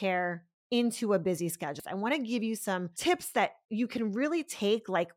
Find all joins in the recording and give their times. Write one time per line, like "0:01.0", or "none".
0:01.8